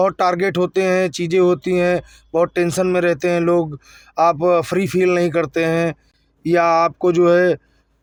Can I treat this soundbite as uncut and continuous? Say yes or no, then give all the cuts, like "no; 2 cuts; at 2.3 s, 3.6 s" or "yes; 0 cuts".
yes; 0 cuts